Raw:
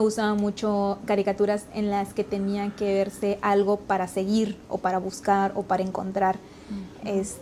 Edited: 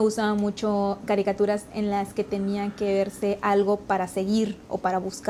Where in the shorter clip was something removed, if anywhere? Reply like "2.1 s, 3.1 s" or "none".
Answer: none